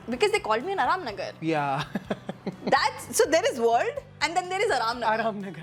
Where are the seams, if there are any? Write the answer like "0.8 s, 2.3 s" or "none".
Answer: none

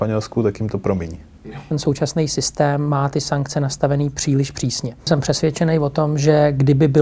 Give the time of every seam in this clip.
1.7 s, 5.1 s

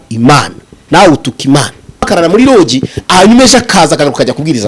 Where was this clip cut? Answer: 2.1 s

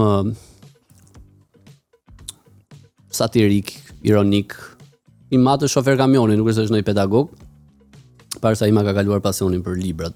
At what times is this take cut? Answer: none

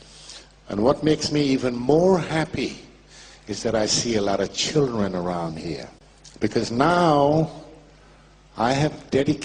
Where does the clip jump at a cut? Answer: none

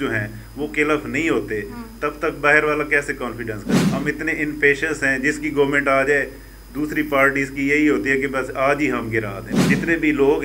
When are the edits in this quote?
3.6 s, 9.4 s

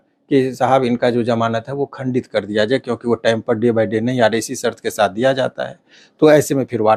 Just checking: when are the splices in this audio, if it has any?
none

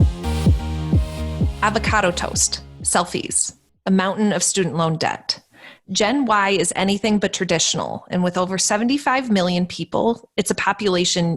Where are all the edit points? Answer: 1.5 s

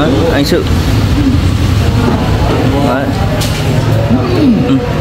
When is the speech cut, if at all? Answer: none

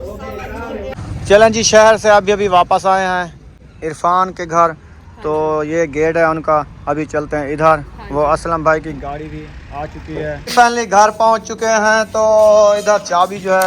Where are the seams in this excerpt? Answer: 0.9 s, 10.5 s

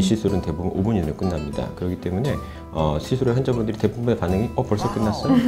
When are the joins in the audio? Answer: none

